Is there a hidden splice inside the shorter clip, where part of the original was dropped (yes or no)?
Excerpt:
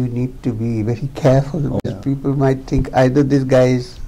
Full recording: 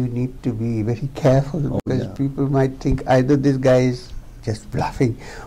yes